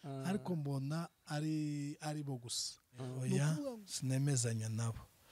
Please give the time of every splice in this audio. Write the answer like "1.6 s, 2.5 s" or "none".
3.4 s